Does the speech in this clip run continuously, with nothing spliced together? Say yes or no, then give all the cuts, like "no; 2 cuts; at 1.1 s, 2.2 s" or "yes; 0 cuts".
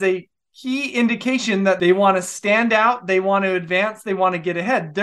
no; 1 cut; at 1.8 s